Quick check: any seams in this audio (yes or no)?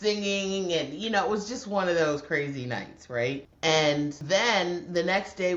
yes